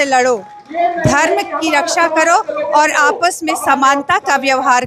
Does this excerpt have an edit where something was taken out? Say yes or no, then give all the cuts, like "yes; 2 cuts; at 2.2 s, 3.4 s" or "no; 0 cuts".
no; 0 cuts